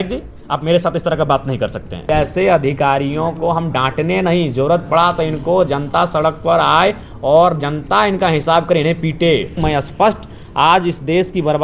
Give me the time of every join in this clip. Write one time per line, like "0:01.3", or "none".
0:02.0
0:09.6